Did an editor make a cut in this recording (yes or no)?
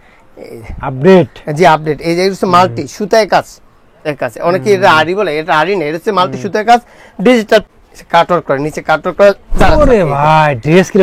yes